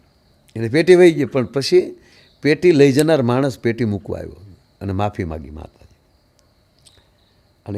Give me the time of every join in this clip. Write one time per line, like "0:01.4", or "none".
none